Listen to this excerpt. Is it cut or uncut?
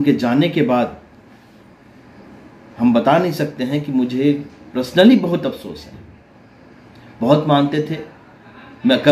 uncut